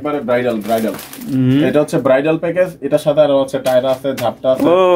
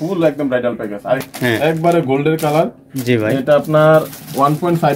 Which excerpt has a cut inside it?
second; 1 cut; at 1.2 s

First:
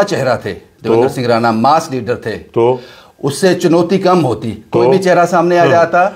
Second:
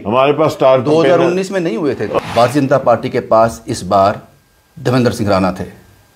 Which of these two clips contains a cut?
second; 1 cut; at 2.2 s

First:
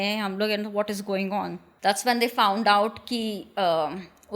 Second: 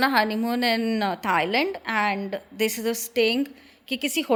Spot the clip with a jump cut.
first; 1 cut; at 1.6 s

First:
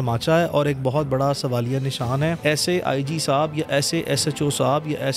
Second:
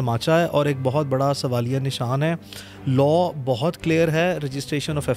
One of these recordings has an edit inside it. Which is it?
first; 1 cut; at 2.4 s

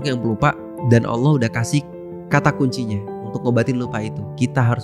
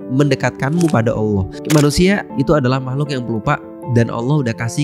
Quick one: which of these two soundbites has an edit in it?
second; 1 cut; at 1.5 s

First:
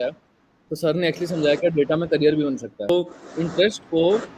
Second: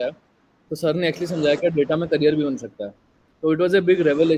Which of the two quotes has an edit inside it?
first; 1 cut; at 2.9 s

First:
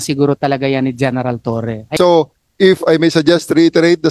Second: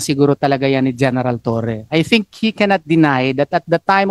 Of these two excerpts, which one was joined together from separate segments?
first; 1 cut; at 1.9 s

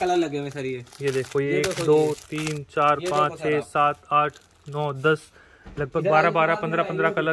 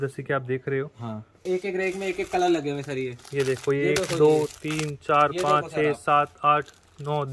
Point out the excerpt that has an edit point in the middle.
second; 1 cut; at 1.3 s

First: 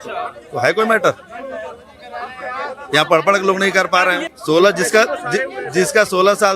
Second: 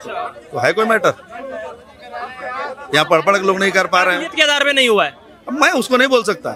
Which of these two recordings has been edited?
first; 1 cut; at 4.3 s

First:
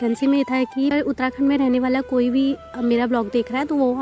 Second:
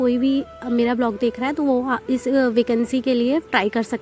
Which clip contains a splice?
first; 1 cut; at 0.9 s

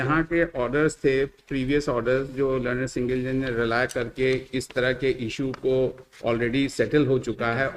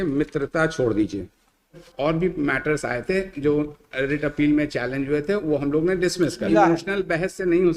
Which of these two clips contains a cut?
second; 2 cuts; at 1.8 s, 6.4 s

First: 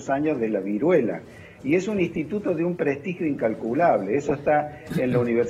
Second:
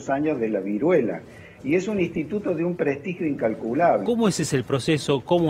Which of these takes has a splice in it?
second; 1 cut; at 4.0 s

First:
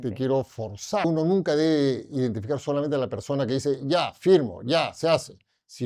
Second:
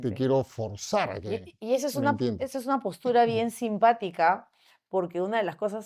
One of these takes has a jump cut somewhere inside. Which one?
first; 1 cut; at 1.1 s

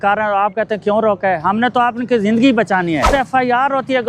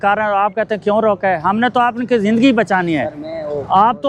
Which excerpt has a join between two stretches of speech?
first; 1 cut; at 3.1 s

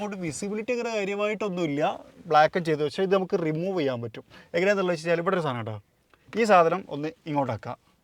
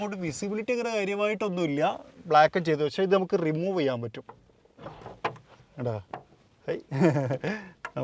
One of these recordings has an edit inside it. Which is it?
second; 1 cut; at 4.3 s

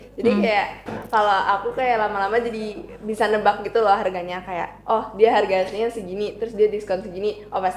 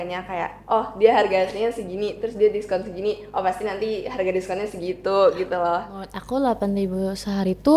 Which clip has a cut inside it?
second; 1 cut; at 6.1 s

